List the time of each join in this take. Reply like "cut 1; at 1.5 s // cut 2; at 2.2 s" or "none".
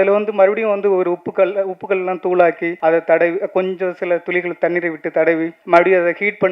cut 1; at 2.7 s // cut 2; at 5.6 s